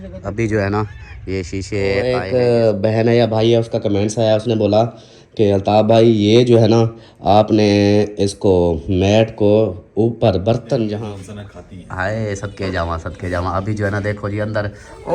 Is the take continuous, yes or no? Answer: no